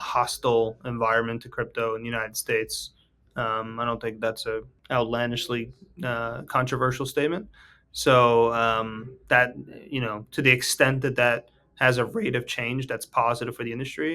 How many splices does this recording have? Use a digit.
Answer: 1